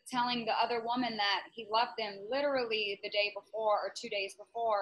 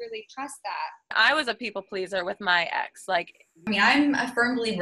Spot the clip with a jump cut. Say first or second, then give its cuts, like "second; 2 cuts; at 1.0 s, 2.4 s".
second; 2 cuts; at 1.1 s, 3.4 s